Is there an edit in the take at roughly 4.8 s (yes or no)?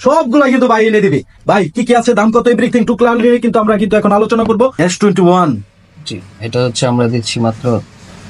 yes